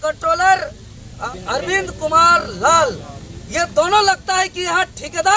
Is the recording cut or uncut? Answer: cut